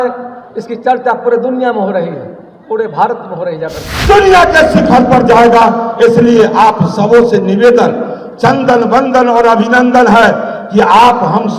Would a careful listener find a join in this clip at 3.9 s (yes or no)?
yes